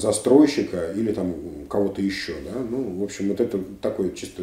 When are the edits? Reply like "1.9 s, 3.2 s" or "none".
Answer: none

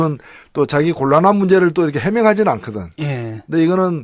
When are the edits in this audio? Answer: none

